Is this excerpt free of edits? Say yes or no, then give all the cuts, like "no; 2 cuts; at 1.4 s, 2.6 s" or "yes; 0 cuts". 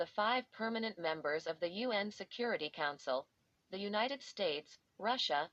yes; 0 cuts